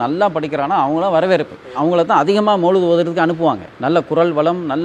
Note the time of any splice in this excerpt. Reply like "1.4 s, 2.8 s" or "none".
none

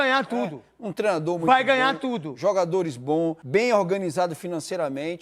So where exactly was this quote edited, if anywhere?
3.4 s

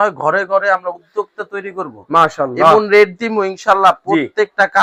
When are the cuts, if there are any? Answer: none

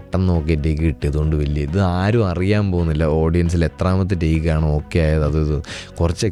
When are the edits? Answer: none

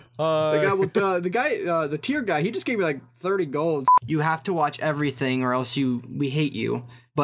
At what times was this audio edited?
3.9 s

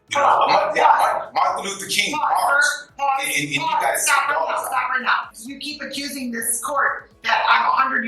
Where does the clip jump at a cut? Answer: 5.2 s

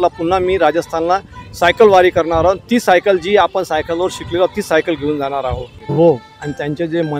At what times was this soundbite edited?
5.9 s

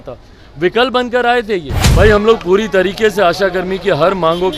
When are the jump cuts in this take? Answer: 1.8 s

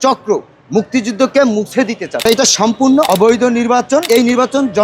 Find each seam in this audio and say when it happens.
2.2 s, 3.1 s, 4.0 s

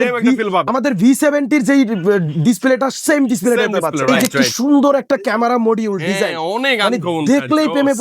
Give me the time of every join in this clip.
4.1 s

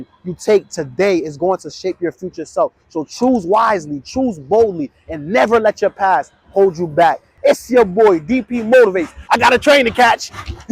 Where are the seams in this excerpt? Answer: 7.3 s, 9.2 s

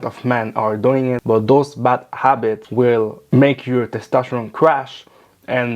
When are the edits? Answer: 1.2 s, 2.6 s

